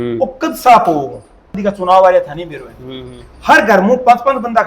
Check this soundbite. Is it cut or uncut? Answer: cut